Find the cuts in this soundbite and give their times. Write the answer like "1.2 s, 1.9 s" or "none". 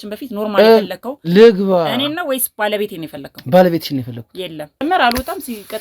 4.8 s